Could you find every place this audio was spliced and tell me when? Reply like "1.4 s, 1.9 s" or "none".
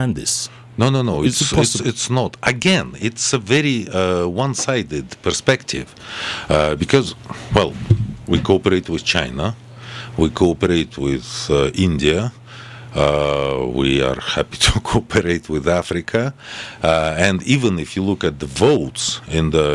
none